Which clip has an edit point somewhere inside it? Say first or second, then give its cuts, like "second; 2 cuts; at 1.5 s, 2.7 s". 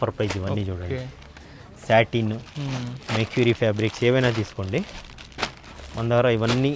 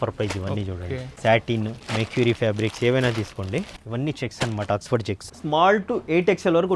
second; 4 cuts; at 1.1 s, 1.8 s, 3.8 s, 5.3 s